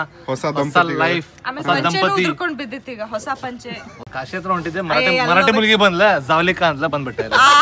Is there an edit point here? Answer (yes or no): yes